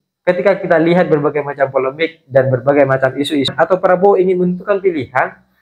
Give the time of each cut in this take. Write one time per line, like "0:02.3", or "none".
0:03.5